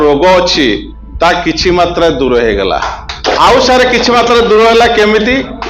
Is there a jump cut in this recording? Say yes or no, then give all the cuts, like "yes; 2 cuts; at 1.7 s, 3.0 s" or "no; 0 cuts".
yes; 1 cut; at 3.1 s